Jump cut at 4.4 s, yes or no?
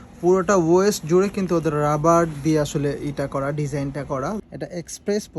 yes